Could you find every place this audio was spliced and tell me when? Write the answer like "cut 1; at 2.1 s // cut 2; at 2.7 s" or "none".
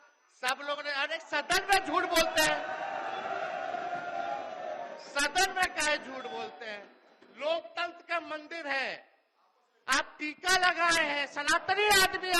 none